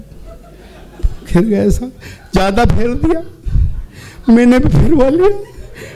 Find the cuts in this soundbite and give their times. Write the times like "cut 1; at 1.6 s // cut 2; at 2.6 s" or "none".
none

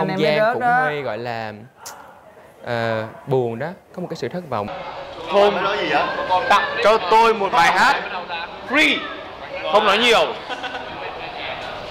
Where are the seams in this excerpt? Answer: cut 1; at 4.7 s

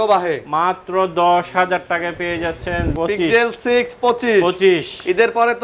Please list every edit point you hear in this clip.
cut 1; at 2.9 s

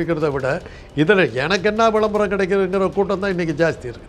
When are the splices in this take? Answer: none

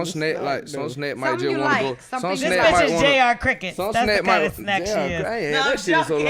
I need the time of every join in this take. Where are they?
none

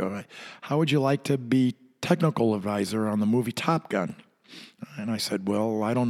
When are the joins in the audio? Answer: none

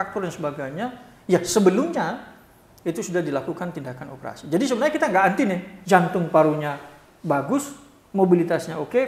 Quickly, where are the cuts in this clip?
cut 1; at 5.7 s

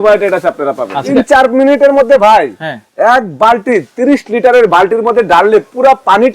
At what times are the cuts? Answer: cut 1; at 1.1 s

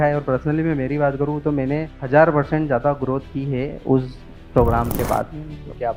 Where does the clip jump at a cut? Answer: none

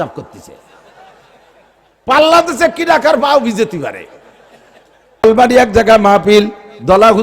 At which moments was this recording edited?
cut 1; at 5.2 s

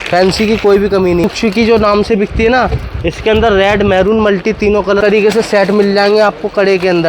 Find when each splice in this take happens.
cut 1; at 1.2 s // cut 2; at 5.0 s

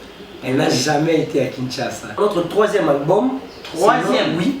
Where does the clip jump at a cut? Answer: cut 1; at 2.2 s

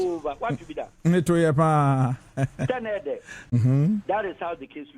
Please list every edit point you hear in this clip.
cut 1; at 3.5 s

